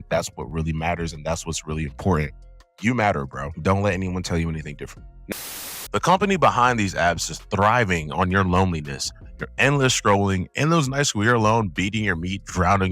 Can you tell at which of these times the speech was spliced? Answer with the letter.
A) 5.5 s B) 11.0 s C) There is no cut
A